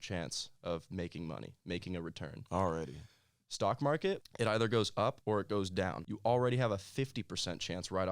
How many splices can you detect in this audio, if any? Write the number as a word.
three